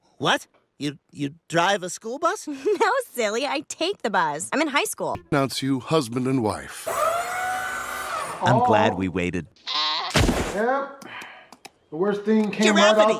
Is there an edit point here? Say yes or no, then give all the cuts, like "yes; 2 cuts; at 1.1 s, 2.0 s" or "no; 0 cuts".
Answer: yes; 2 cuts; at 5.2 s, 9.4 s